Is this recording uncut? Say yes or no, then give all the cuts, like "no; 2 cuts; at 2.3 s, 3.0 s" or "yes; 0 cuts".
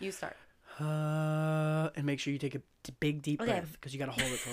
yes; 0 cuts